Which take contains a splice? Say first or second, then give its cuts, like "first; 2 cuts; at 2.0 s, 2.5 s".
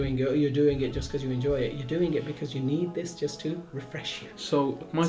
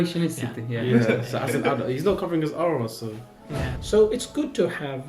second; 1 cut; at 3.7 s